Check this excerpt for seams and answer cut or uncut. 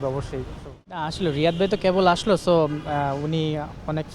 cut